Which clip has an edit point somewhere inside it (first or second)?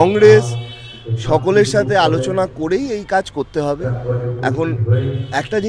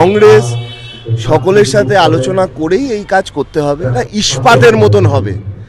second